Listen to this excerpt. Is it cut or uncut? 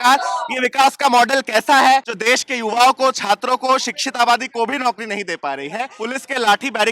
cut